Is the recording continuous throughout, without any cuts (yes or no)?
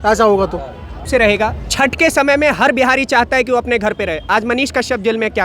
no